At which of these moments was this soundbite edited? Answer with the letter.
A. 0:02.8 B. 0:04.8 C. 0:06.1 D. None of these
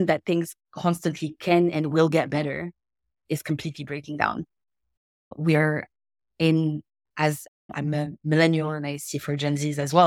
D